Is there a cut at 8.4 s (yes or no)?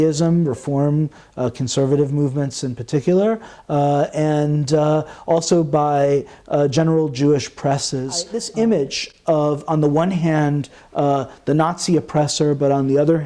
yes